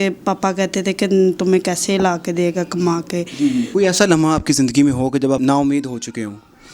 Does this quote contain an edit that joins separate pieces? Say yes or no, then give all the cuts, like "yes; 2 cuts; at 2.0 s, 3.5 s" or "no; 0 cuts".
yes; 2 cuts; at 3.7 s, 5.4 s